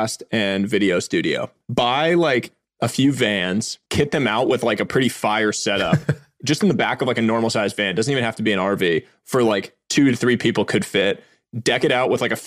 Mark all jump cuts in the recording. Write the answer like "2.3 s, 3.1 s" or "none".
1.5 s, 3.8 s